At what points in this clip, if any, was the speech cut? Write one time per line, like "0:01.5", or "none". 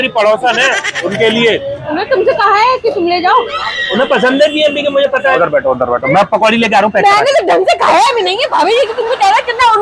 0:00.9
0:01.8
0:03.7
0:05.3